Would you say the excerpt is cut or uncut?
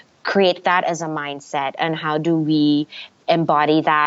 uncut